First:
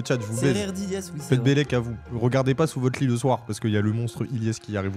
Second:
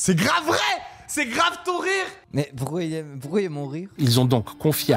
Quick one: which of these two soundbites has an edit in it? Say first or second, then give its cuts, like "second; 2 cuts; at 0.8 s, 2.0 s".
second; 2 cuts; at 2.1 s, 3.9 s